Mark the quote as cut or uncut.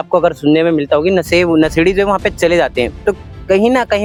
uncut